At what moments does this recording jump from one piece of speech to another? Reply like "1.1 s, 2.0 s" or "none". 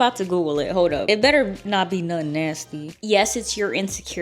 1.0 s, 2.9 s